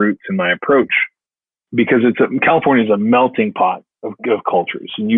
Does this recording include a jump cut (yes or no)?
no